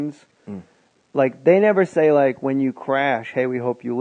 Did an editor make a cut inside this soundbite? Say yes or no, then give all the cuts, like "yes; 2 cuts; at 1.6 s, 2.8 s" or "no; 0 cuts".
yes; 1 cut; at 2.8 s